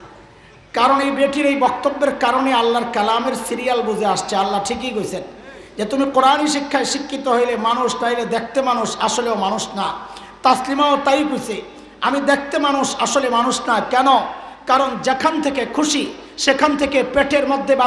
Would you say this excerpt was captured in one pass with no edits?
yes; 0 cuts

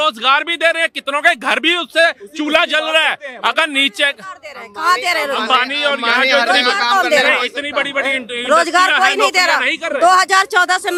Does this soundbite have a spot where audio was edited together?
no; 0 cuts

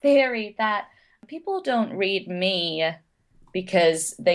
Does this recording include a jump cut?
yes; 1 cut; at 1.3 s

